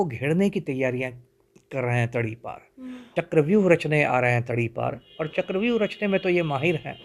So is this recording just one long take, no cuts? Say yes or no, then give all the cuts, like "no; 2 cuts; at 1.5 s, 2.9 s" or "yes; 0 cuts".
no; 1 cut; at 3.0 s